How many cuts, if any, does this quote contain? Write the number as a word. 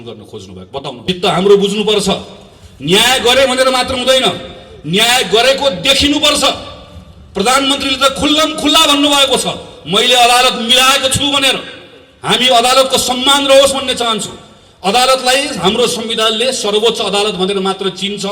one